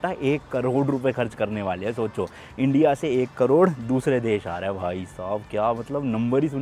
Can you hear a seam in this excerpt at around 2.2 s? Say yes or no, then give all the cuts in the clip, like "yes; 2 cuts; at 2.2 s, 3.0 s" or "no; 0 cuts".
no; 0 cuts